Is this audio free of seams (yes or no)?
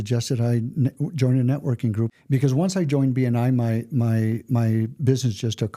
no